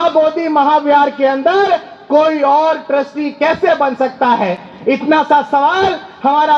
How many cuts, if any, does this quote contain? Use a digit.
0